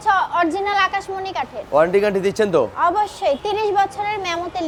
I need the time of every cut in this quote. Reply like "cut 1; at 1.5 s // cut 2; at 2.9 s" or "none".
none